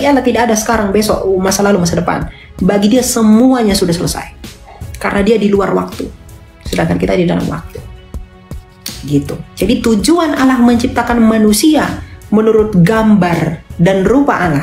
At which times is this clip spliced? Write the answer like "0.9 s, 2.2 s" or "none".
none